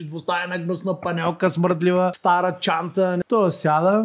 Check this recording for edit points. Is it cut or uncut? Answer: cut